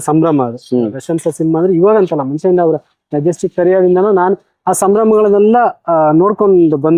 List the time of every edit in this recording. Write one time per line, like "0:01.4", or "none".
none